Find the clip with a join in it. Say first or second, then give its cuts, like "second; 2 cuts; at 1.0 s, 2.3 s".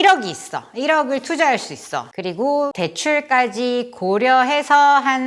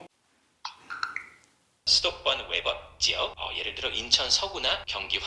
second; 1 cut; at 1.9 s